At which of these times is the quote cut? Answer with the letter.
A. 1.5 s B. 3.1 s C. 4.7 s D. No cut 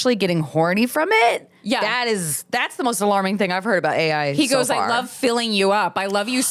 D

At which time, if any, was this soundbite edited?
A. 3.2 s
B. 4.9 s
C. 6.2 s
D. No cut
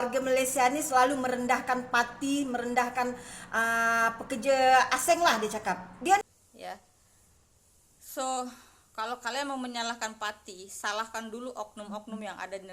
C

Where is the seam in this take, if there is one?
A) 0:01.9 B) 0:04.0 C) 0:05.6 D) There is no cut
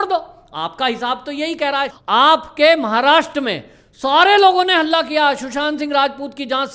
A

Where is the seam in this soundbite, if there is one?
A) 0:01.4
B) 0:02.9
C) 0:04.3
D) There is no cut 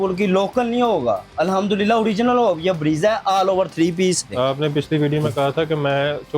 C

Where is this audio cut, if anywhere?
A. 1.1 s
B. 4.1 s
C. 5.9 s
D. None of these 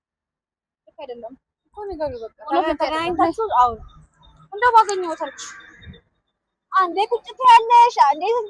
D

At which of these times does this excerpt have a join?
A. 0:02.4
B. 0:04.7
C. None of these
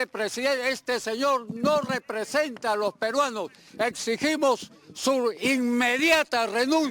C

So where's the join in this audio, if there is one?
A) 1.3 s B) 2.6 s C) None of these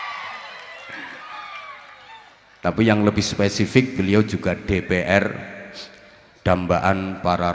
A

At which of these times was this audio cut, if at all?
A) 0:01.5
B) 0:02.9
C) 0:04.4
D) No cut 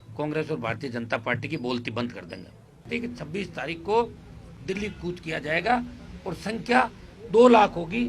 B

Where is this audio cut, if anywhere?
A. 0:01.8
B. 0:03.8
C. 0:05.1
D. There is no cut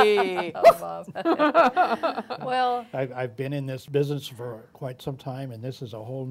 B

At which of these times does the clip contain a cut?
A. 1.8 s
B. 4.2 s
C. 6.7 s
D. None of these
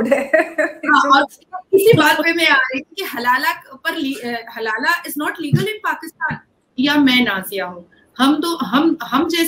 C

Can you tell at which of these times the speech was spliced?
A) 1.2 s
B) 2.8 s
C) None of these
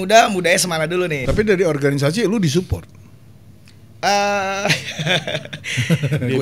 A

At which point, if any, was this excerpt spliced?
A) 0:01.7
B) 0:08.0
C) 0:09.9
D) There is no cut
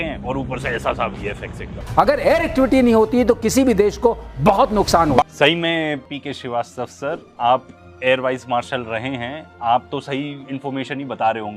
A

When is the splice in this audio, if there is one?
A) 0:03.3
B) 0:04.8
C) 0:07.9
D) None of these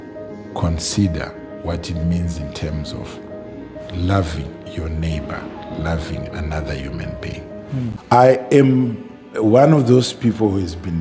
C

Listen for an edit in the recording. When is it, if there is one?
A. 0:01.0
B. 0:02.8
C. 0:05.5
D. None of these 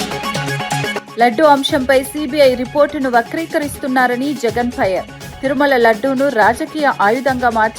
A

